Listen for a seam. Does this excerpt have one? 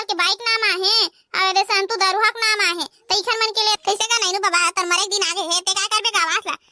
yes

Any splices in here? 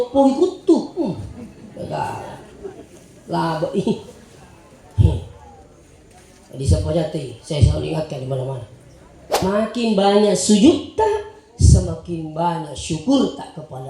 yes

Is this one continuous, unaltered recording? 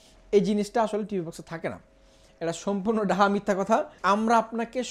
no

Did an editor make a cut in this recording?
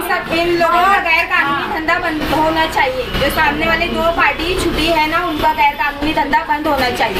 no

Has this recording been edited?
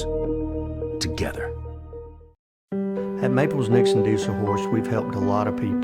yes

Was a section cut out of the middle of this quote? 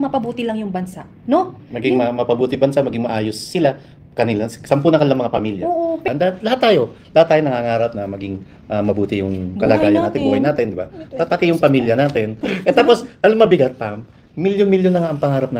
yes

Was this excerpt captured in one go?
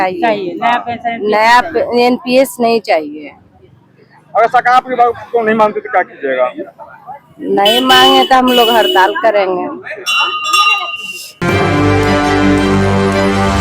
no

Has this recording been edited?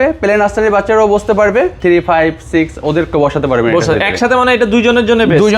yes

